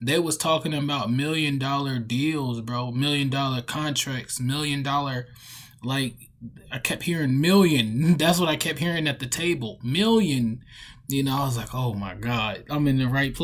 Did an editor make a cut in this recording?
no; 0 cuts

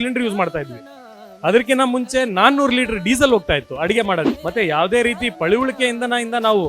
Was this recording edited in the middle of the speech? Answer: yes; 1 cut; at 4.4 s

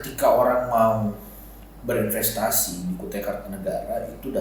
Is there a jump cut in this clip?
no; 0 cuts

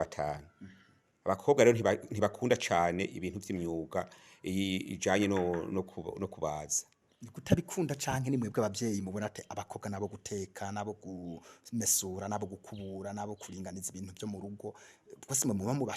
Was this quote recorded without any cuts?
yes; 0 cuts

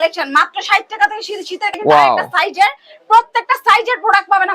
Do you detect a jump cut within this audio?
yes; 1 cut; at 1.7 s

